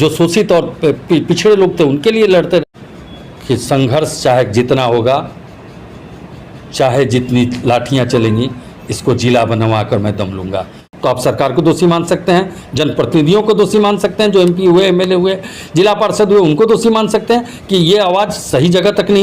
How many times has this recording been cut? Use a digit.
2